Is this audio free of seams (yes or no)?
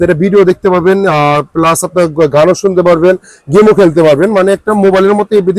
yes